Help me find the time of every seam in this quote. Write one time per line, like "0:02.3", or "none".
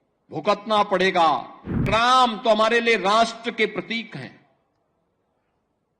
0:01.9